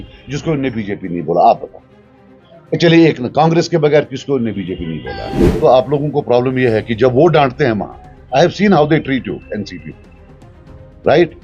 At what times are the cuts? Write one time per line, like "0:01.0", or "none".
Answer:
0:05.4